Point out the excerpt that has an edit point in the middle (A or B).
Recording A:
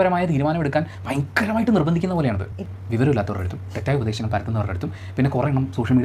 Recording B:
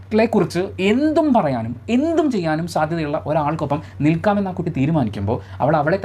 A